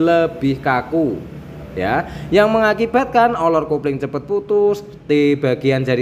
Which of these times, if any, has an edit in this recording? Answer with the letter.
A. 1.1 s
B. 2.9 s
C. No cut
C